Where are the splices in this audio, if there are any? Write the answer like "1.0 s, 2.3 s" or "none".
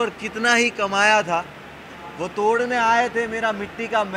none